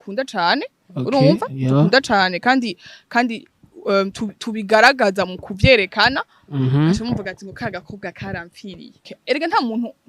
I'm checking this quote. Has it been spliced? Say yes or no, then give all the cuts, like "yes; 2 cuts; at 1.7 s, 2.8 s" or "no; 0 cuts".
yes; 1 cut; at 9.1 s